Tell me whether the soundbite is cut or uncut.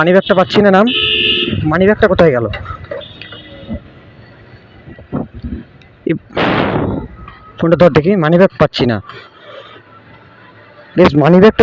uncut